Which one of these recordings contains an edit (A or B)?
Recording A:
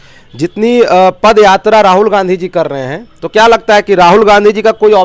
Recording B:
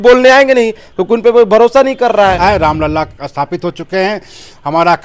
B